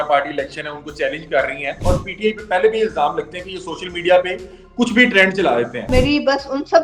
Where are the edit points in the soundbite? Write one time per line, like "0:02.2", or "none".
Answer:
0:01.8
0:05.9